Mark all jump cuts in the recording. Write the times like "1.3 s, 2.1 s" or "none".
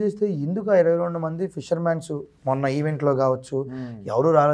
none